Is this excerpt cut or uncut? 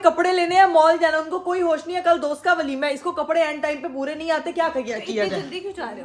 uncut